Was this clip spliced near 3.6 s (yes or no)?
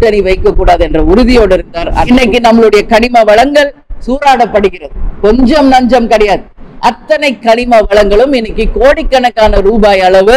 no